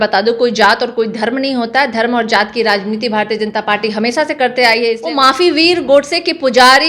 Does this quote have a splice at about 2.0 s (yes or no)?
no